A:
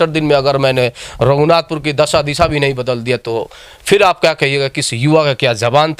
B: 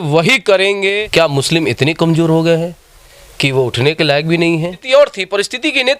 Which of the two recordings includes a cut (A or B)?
B